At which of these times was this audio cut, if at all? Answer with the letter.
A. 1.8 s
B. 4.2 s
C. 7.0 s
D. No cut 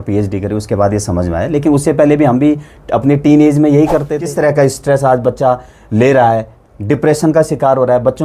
B